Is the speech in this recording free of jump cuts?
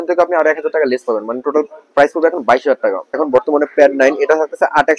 no; 1 cut; at 3.2 s

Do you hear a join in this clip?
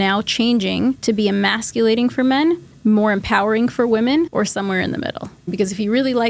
yes; 4 cuts; at 1.0 s, 2.7 s, 4.3 s, 5.5 s

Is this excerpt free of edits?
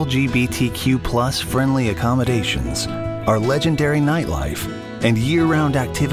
yes; 0 cuts

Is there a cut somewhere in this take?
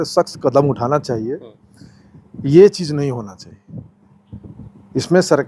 no; 0 cuts

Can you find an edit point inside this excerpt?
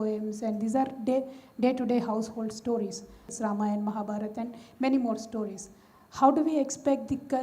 yes; 1 cut; at 3.3 s

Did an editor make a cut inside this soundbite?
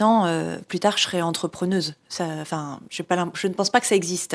no; 0 cuts

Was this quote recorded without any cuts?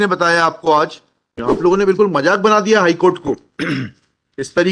no; 1 cut; at 1.3 s

